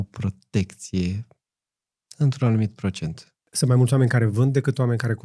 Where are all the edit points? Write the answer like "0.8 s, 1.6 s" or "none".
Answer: 3.4 s

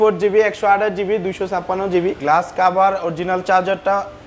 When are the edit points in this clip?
2.2 s

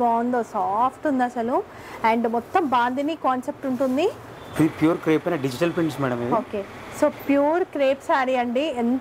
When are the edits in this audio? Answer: 4.4 s

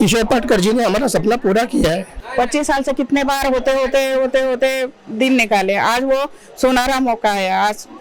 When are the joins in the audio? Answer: 2.1 s

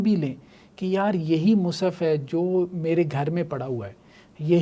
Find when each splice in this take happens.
none

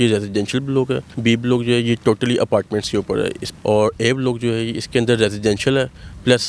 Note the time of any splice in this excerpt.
1.1 s, 3.5 s

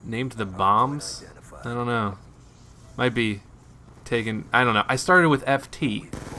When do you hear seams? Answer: 3.1 s

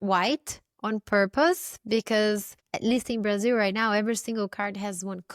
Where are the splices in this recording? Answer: none

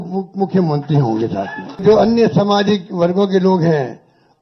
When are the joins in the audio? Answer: 1.8 s

